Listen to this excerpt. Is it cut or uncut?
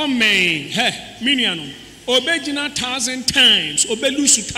uncut